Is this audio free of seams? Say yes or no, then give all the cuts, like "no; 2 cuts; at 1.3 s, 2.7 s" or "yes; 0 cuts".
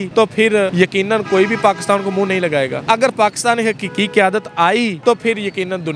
yes; 0 cuts